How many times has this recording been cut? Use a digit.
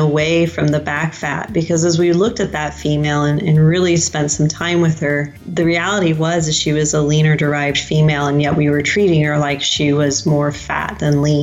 1